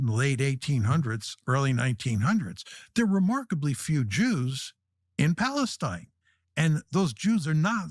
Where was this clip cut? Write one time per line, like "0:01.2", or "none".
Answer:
none